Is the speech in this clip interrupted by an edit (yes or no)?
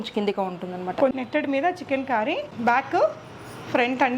yes